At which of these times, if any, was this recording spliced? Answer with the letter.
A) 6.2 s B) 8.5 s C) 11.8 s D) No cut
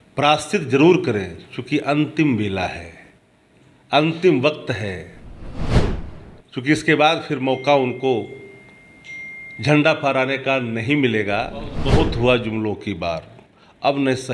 C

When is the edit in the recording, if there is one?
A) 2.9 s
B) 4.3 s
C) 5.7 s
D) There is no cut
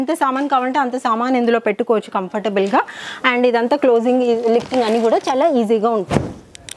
D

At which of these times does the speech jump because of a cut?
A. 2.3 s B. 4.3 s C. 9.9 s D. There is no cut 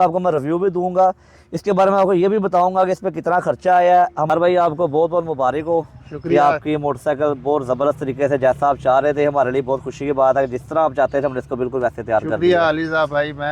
B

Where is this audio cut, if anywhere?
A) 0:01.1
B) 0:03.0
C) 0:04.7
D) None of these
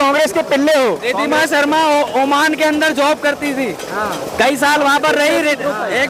D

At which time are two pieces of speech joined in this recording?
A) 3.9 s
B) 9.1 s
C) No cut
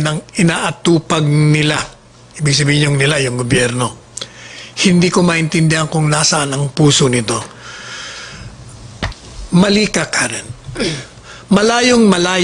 B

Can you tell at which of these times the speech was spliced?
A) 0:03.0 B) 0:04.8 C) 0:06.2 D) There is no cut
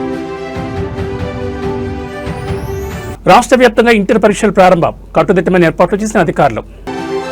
A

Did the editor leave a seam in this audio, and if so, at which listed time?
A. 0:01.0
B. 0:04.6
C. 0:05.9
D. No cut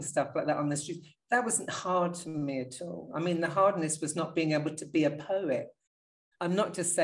C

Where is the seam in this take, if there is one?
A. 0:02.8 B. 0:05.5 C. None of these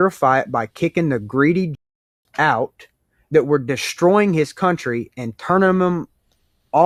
C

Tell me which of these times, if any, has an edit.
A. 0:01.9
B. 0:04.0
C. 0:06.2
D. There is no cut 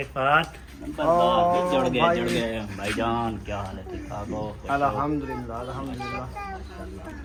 D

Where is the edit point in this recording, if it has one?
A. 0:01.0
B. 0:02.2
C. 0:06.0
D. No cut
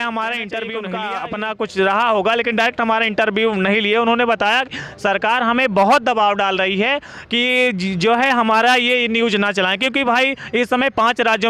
A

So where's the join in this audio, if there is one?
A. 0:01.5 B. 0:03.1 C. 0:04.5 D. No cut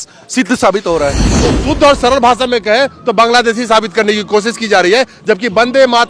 A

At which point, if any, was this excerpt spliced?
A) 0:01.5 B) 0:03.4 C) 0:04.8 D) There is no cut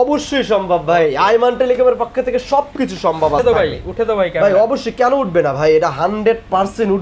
B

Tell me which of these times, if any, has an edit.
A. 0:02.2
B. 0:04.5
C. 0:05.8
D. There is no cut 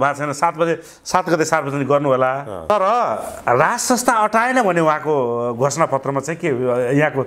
D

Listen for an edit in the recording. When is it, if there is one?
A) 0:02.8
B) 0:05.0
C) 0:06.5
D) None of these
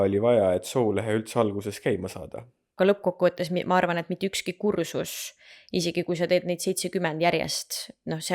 A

